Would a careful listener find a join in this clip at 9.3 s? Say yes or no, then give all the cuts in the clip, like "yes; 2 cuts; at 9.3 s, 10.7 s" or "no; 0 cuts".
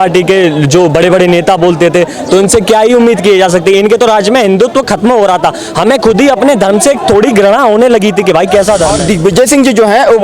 yes; 1 cut; at 9.3 s